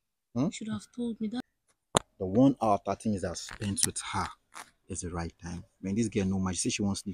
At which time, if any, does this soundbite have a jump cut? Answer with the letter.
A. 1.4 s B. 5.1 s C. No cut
A